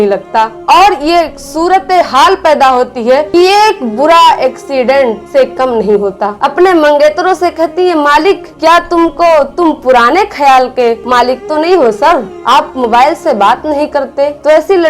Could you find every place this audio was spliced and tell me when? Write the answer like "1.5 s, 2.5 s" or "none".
3.3 s, 6.4 s, 11.0 s